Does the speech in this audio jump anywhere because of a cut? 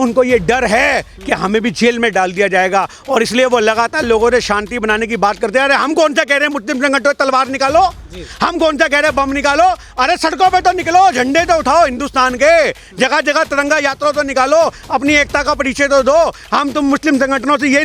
no; 0 cuts

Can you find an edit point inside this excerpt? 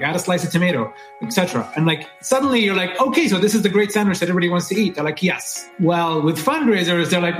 yes; 1 cut; at 5.7 s

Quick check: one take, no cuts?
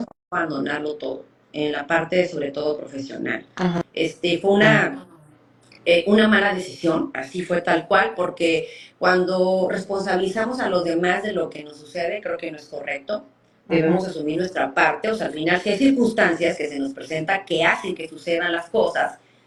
yes; 0 cuts

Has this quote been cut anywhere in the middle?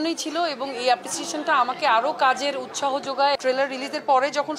yes; 1 cut; at 3.4 s

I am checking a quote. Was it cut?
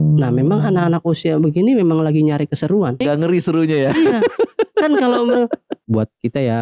yes; 2 cuts; at 3.0 s, 5.7 s

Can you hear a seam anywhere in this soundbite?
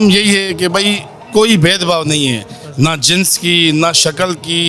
no; 0 cuts

